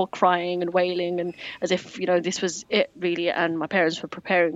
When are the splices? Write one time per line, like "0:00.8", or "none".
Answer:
0:02.4